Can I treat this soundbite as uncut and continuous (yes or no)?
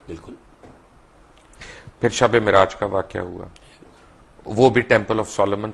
yes